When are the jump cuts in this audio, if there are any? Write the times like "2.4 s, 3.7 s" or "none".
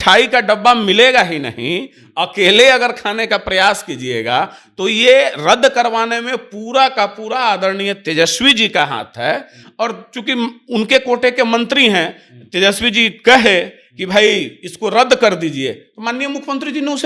none